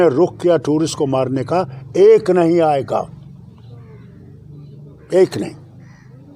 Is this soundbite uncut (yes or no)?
yes